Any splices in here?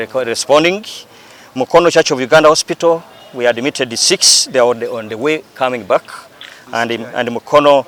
no; 0 cuts

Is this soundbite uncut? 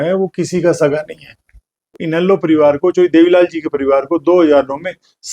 no; 1 cut; at 2.0 s

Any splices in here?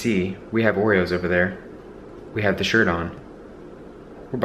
no; 0 cuts

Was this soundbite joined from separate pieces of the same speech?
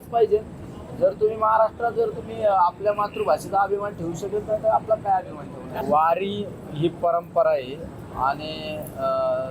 yes; 1 cut; at 5.7 s

